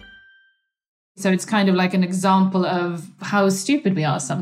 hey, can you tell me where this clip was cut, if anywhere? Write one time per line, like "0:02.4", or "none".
0:01.2